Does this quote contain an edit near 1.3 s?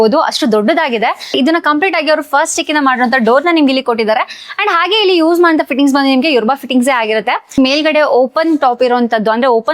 yes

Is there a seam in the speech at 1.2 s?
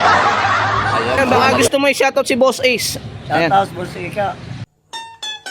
yes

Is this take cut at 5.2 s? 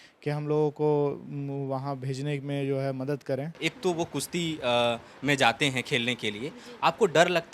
no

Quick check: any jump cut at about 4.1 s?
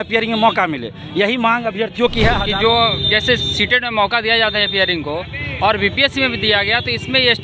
no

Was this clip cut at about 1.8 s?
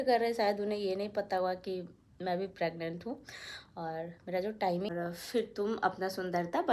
no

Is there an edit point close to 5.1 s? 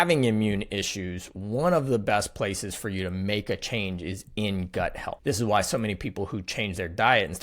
yes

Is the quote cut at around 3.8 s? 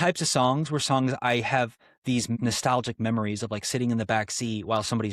no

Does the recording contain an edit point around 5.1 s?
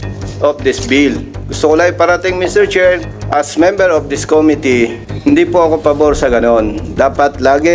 yes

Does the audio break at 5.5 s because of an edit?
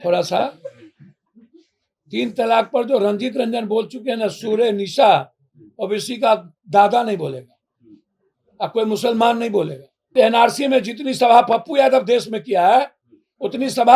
no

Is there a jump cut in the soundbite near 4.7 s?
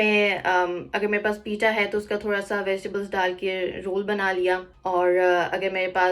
yes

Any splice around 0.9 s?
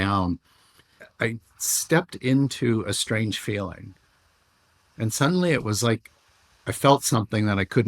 yes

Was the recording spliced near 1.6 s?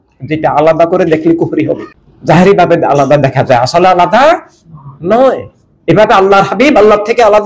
no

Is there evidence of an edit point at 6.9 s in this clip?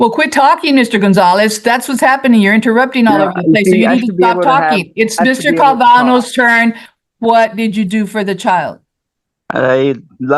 yes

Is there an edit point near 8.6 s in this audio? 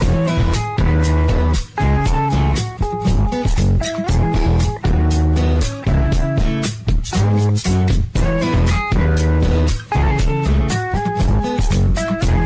no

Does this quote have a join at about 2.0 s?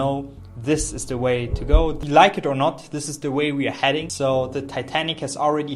yes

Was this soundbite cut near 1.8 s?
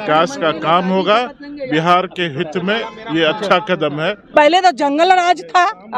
no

